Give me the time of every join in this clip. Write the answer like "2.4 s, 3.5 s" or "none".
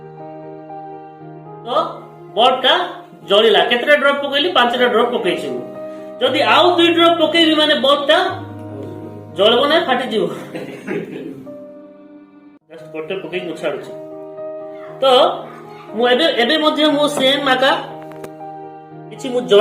1.6 s